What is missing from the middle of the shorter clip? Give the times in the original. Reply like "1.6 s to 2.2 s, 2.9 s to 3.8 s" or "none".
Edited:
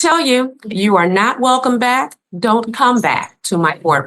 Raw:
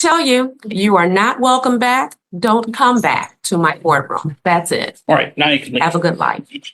none

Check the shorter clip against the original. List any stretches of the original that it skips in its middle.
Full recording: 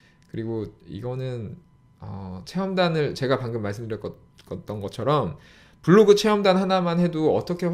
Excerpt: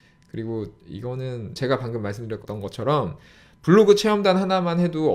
1.6 s to 3.2 s, 4.0 s to 4.6 s

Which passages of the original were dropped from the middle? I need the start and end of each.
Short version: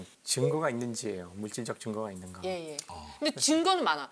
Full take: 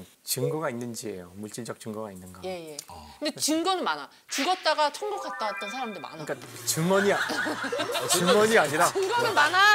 none

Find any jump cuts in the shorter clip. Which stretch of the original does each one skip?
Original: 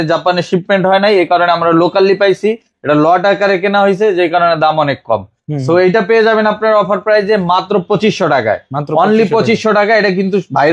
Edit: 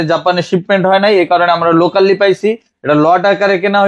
none

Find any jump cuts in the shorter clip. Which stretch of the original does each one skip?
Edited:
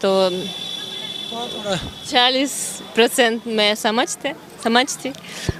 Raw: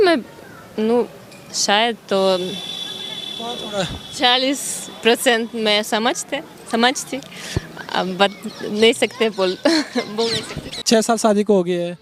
none

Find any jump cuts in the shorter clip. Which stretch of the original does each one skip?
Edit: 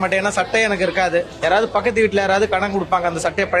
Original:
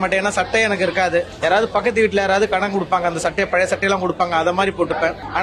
none

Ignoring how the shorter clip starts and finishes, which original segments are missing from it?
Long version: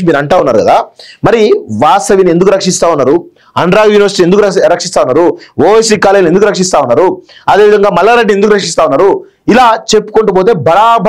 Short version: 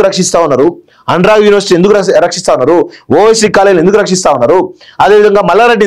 none

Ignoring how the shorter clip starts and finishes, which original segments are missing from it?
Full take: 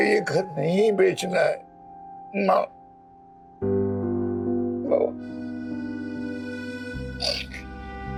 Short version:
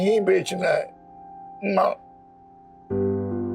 none

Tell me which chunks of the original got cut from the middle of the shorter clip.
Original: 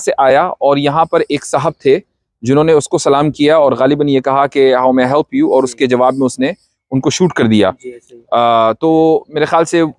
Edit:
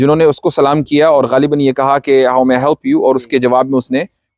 none

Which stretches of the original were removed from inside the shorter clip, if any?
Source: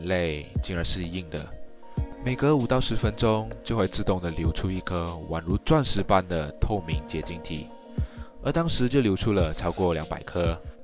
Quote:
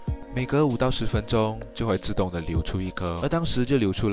5.1 s to 8.4 s

